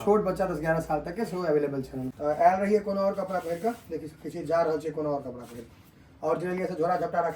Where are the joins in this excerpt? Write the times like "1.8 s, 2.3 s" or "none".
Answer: 2.0 s